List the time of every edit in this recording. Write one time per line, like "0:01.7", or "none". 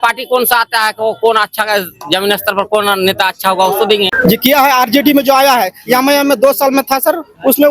0:04.1